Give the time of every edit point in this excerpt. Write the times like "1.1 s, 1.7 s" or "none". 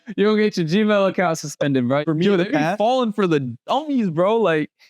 2.0 s